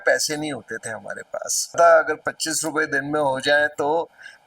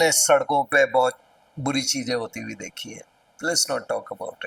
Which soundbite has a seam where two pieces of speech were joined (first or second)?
first